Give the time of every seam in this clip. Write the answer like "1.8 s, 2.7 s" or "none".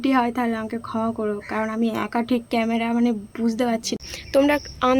4.1 s

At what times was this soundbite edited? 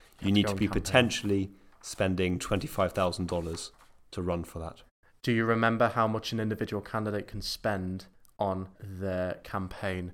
8.5 s

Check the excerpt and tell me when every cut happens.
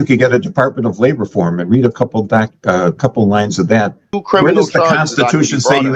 4.1 s

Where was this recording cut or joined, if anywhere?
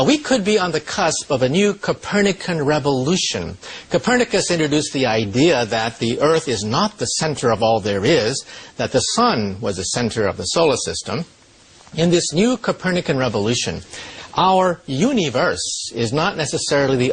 none

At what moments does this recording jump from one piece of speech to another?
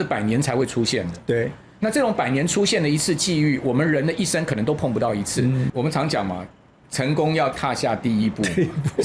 5.7 s

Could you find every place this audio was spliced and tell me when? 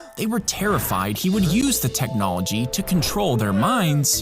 1.6 s

